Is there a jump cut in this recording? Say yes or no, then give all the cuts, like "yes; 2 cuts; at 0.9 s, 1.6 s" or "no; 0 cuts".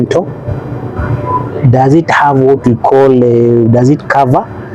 no; 0 cuts